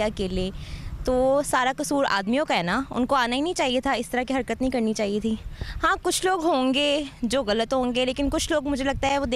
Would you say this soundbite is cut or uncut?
uncut